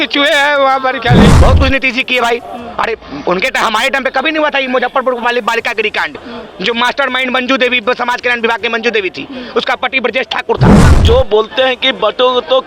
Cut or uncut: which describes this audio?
cut